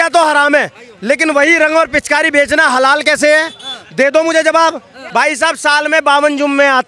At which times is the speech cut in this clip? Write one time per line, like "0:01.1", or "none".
0:04.9